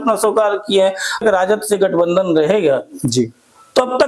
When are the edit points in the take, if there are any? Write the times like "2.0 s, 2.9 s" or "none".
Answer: 1.2 s